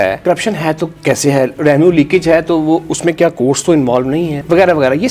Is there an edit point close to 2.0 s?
no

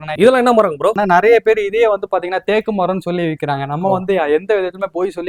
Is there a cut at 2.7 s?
no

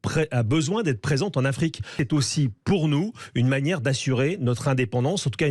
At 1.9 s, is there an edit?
yes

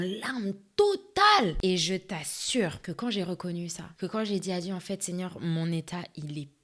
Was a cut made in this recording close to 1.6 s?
yes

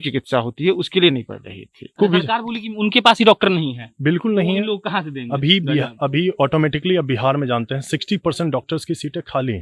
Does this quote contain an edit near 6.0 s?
no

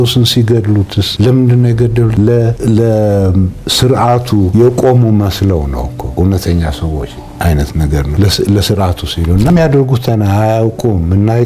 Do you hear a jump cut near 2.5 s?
yes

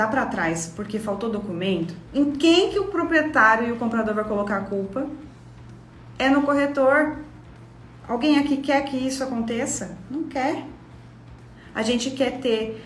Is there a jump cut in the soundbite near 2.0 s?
yes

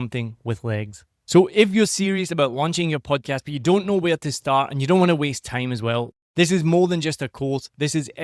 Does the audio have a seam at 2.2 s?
no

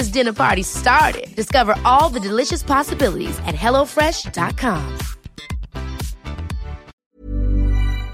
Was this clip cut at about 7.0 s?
yes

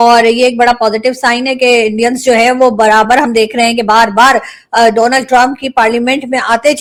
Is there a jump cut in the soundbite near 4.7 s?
no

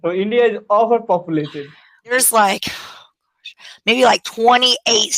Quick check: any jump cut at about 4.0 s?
no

